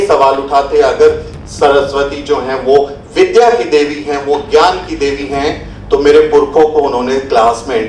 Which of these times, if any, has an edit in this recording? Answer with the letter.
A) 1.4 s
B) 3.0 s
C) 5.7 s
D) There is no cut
D